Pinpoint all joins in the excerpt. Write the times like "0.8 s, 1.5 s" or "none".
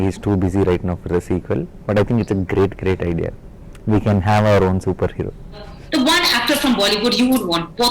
5.8 s